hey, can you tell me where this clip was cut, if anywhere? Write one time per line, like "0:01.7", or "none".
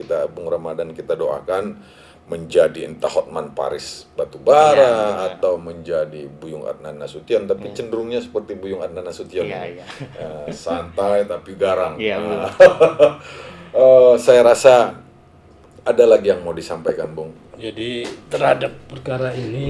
none

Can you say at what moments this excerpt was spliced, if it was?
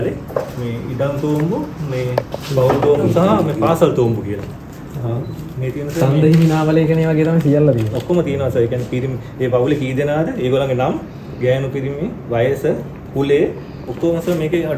none

